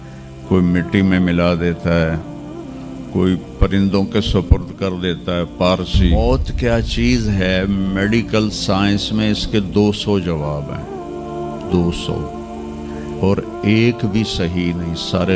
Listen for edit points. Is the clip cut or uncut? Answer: cut